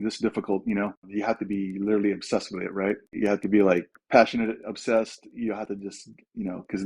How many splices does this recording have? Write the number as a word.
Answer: two